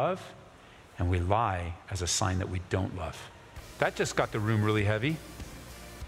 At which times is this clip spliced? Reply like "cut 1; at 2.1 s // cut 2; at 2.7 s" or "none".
cut 1; at 3.6 s